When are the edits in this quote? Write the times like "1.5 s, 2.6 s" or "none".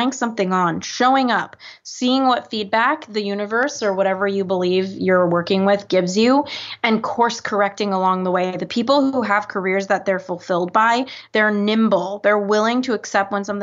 none